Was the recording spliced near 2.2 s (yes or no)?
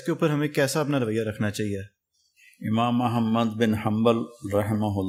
no